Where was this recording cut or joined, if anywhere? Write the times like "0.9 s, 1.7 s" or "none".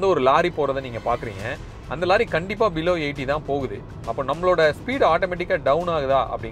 none